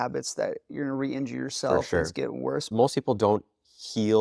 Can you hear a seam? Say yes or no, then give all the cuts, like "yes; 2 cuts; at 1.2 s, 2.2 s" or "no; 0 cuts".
yes; 1 cut; at 2.7 s